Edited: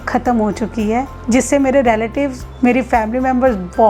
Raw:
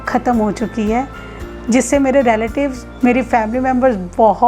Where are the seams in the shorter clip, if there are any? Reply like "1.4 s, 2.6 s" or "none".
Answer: 1.1 s